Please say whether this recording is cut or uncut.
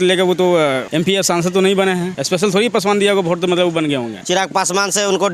cut